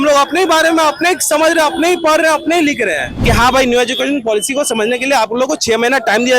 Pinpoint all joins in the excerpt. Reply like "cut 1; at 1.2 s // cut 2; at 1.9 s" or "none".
cut 1; at 3.1 s